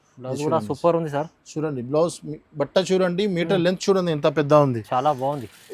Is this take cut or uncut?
uncut